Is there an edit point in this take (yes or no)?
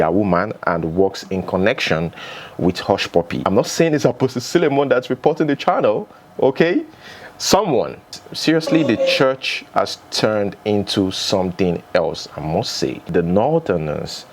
yes